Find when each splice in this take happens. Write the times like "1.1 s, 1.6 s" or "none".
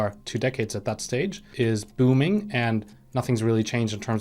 1.4 s